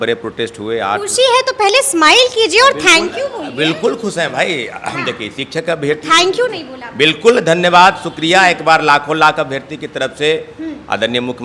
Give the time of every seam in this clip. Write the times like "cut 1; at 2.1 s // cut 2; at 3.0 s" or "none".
none